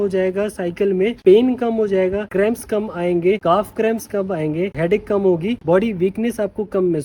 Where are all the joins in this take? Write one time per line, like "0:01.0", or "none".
0:04.7